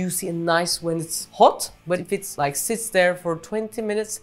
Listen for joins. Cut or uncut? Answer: cut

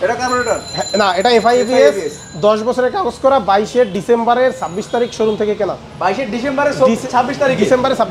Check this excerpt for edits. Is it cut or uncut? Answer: uncut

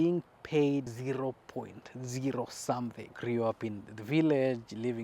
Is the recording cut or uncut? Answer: cut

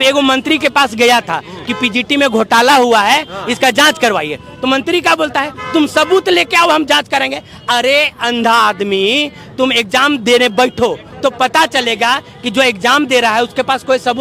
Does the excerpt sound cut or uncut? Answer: uncut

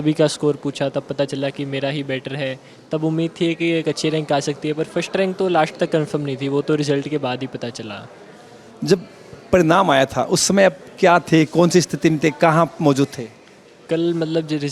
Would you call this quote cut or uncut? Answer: uncut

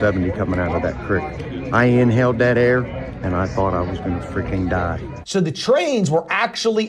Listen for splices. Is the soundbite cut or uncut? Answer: cut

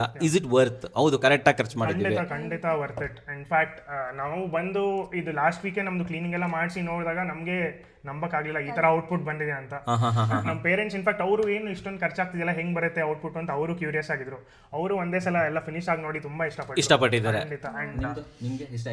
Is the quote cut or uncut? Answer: uncut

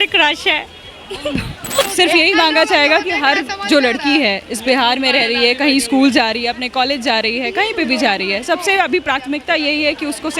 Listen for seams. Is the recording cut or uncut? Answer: cut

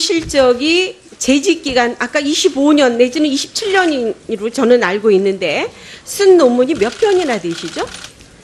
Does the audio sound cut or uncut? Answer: cut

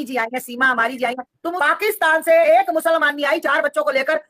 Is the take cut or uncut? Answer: cut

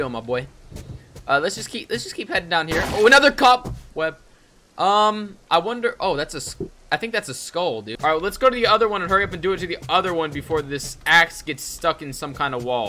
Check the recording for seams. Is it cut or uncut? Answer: cut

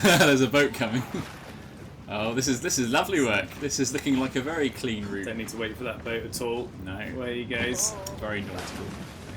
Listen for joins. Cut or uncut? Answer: uncut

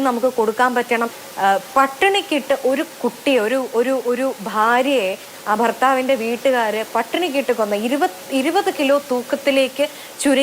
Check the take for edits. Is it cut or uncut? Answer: cut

